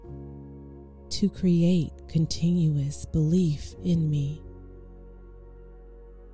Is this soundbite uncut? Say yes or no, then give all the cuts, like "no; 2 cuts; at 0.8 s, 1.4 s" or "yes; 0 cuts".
no; 2 cuts; at 1.0 s, 4.4 s